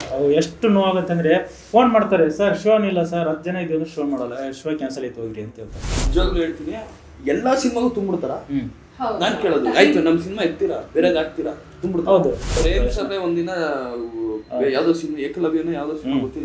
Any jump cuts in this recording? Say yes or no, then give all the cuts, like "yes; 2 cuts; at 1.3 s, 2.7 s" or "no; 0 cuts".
yes; 2 cuts; at 6.0 s, 12.6 s